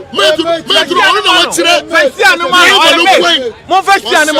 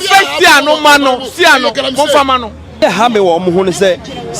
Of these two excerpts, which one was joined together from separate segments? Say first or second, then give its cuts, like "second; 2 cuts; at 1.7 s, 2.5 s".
second; 1 cut; at 2.8 s